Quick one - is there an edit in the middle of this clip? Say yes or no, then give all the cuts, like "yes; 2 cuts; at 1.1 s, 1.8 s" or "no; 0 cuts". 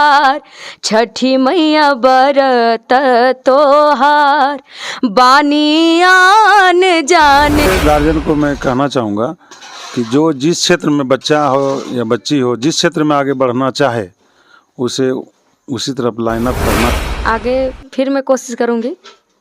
yes; 2 cuts; at 7.6 s, 16.9 s